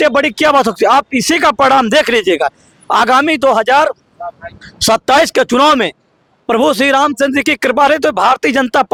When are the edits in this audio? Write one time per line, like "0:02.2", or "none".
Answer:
none

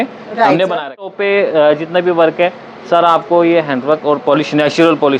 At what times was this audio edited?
0:01.1

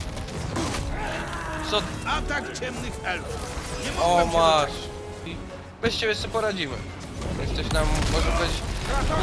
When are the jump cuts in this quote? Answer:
0:05.3

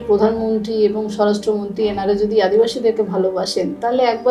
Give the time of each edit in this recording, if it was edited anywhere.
none

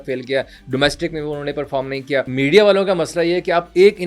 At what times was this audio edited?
0:02.3

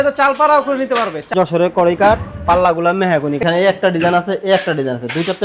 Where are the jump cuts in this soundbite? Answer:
0:01.3
0:03.4

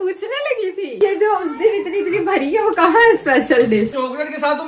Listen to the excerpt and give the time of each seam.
0:00.9
0:03.9

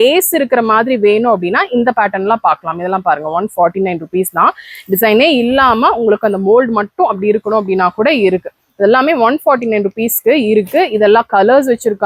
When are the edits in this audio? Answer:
none

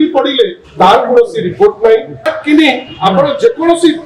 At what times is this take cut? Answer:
0:02.3

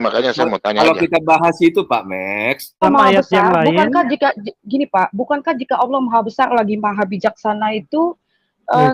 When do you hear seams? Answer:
0:02.8

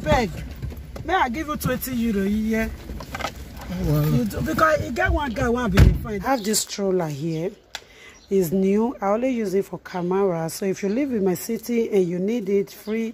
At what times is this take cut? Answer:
0:06.2

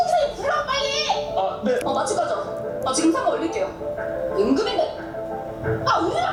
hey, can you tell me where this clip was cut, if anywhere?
none

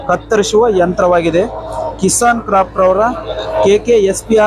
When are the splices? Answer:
none

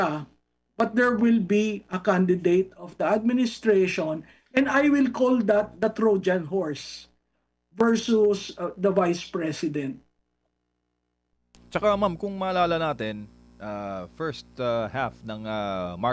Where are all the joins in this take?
none

